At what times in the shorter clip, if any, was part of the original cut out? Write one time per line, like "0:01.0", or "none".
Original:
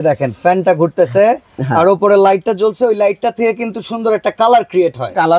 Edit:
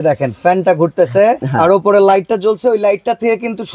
0:01.5